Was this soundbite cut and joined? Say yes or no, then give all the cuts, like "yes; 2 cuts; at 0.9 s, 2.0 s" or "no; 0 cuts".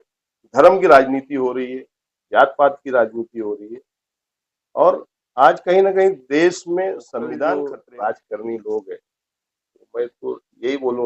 yes; 1 cut; at 7.6 s